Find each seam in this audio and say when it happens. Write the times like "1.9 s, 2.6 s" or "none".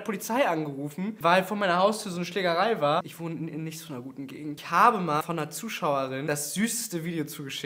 4.6 s, 5.2 s, 6.2 s